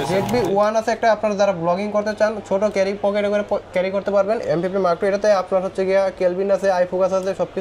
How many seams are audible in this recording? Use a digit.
1